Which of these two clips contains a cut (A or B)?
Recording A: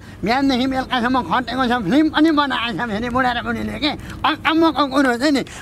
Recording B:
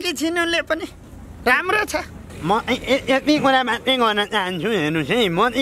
B